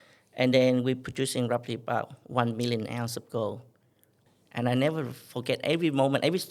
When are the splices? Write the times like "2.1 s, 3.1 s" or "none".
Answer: 4.2 s